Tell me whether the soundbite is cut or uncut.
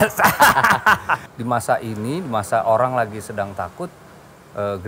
cut